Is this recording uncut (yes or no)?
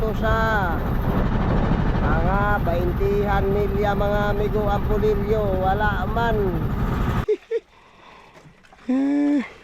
no